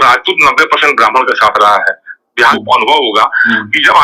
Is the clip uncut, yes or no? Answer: no